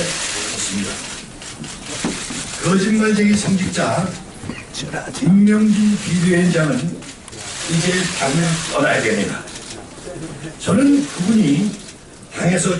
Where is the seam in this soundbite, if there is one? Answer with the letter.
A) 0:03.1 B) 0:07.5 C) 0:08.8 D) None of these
B